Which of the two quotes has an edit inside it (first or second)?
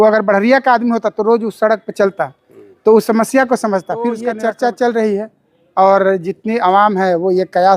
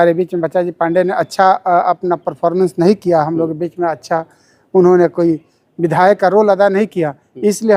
first